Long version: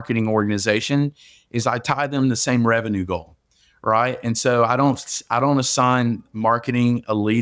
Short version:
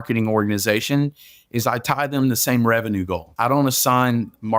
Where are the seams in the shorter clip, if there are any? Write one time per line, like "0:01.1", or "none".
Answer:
0:03.3